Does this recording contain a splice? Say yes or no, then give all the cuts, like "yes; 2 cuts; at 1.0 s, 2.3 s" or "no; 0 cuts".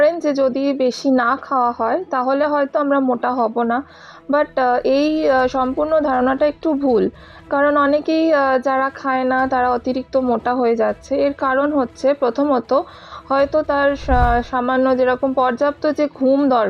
no; 0 cuts